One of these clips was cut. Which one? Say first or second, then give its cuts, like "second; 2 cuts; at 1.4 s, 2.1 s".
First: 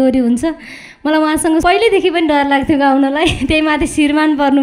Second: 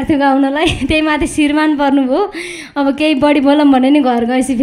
first; 1 cut; at 1.6 s